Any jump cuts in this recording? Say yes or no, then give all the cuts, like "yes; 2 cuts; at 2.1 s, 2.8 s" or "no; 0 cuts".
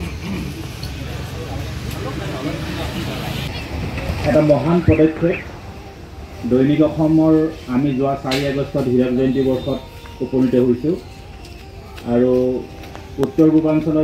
yes; 1 cut; at 3.5 s